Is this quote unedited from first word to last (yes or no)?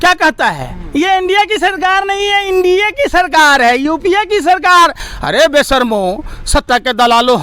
yes